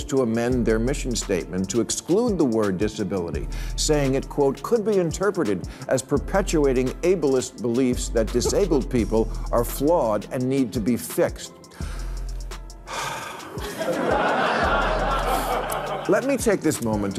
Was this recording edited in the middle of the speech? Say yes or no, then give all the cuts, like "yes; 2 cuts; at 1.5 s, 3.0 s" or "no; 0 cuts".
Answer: no; 0 cuts